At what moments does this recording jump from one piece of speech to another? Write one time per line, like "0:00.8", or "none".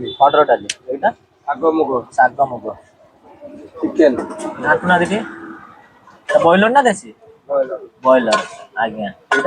none